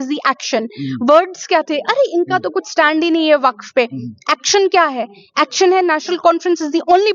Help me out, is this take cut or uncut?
uncut